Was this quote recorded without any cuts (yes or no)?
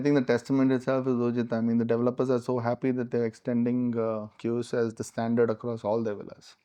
yes